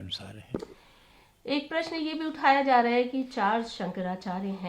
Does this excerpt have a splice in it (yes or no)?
no